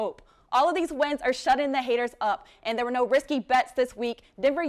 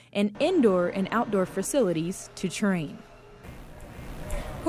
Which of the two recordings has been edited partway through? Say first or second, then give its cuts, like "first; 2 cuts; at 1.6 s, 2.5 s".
second; 1 cut; at 3.4 s